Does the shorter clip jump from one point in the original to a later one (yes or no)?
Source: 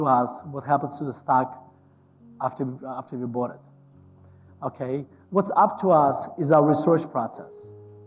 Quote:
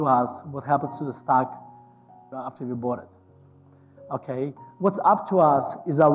yes